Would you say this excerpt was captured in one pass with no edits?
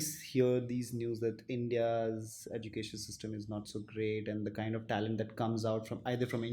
yes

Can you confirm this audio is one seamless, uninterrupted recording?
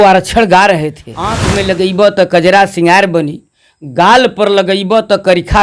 no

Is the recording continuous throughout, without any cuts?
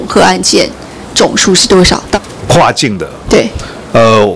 no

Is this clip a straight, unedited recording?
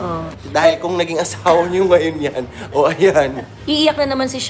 no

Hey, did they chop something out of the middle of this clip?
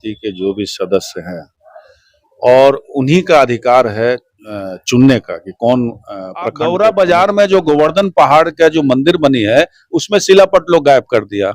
yes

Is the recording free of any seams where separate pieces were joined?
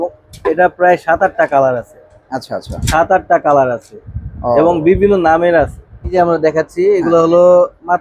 no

